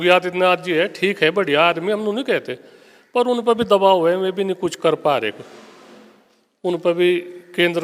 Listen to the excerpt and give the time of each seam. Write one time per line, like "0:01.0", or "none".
none